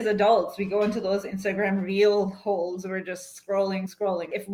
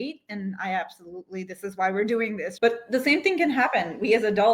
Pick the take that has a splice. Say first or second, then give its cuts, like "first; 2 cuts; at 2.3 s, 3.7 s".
second; 1 cut; at 2.5 s